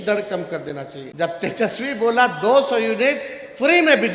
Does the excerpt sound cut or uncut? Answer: cut